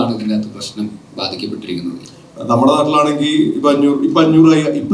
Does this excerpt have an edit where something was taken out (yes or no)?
yes